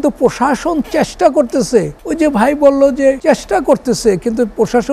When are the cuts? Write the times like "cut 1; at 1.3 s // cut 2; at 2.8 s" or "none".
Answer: cut 1; at 2.0 s // cut 2; at 3.2 s